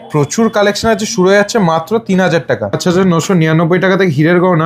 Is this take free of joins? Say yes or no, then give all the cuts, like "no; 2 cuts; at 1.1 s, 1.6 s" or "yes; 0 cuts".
no; 1 cut; at 2.8 s